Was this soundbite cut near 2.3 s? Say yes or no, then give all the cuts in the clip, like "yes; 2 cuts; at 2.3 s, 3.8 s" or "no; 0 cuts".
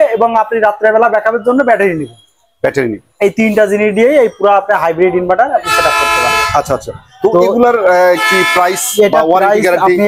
no; 0 cuts